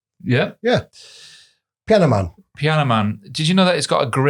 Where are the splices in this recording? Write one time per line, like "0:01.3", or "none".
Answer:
none